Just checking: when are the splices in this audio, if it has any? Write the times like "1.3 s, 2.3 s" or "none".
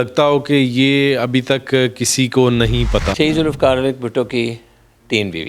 3.1 s